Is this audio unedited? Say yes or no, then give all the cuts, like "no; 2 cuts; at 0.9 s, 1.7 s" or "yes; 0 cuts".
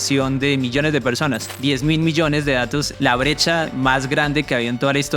no; 1 cut; at 1.5 s